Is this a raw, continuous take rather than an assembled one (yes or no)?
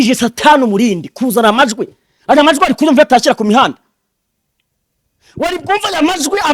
yes